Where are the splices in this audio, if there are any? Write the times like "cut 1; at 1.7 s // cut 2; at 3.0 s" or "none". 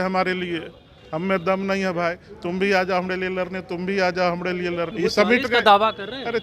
cut 1; at 4.9 s